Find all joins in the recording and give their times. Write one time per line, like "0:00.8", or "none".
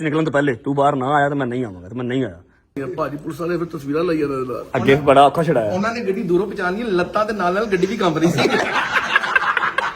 0:02.8
0:08.7

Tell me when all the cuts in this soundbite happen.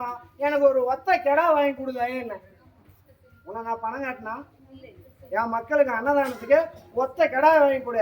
none

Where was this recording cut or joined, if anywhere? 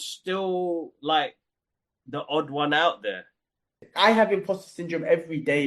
0:03.9

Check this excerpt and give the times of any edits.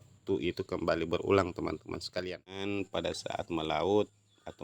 0:02.7

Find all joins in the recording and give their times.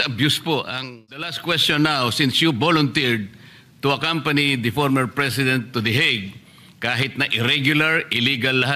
0:01.3

